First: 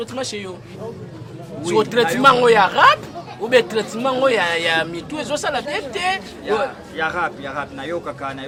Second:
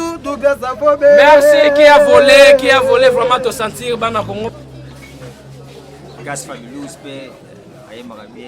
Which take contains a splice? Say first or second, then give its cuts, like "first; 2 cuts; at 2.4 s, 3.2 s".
second; 1 cut; at 4.5 s